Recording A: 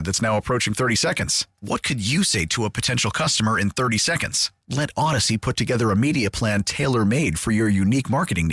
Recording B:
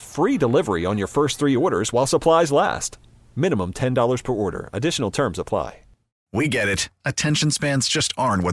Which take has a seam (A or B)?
B